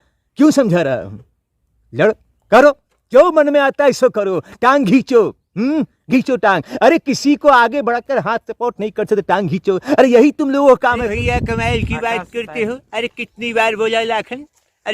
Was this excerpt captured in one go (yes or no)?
no